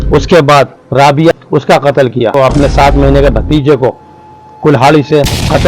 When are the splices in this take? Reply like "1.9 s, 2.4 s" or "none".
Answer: 1.3 s, 2.3 s